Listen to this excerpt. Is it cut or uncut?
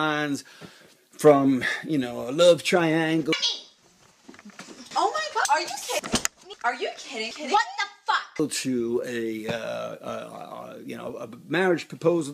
uncut